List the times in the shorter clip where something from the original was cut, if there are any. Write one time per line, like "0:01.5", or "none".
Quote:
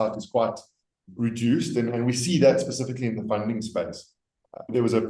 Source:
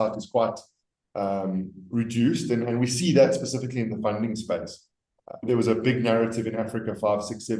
0:01.0